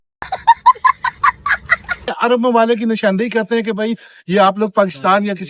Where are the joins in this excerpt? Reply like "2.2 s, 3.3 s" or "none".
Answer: 2.1 s